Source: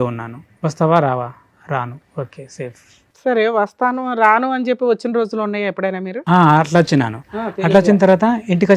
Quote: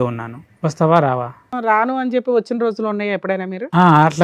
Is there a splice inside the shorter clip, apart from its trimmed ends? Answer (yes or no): yes